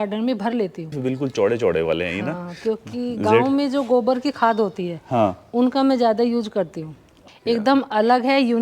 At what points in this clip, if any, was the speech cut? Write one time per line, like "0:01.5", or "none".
0:01.0
0:07.2